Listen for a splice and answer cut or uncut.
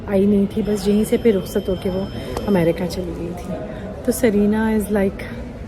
uncut